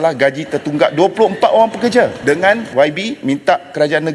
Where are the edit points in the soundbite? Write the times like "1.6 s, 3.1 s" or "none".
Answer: 2.2 s

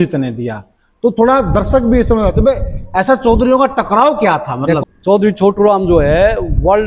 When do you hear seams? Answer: 4.8 s

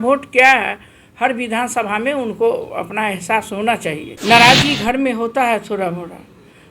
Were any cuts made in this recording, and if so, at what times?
4.1 s

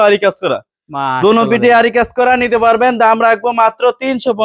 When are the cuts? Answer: none

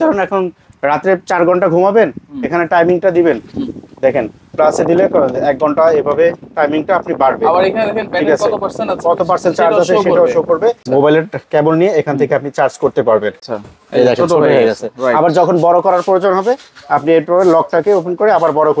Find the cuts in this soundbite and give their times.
10.8 s, 13.4 s

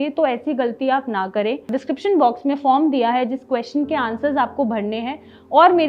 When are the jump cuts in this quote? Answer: 1.7 s

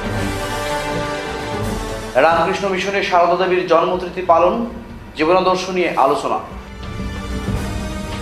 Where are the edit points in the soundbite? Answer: 1.5 s

